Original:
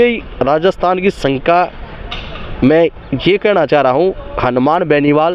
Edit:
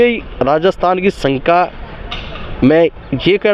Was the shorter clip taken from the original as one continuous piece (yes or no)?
yes